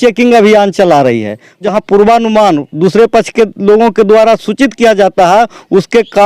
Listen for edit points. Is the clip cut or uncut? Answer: cut